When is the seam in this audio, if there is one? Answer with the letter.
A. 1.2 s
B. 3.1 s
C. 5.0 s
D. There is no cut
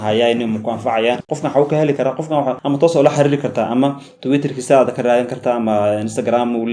A